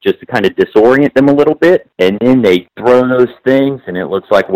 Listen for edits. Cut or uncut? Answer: cut